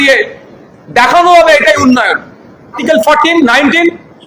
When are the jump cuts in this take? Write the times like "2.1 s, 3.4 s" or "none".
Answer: 2.8 s